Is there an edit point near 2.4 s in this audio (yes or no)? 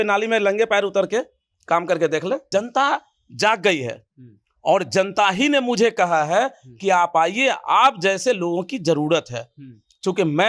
yes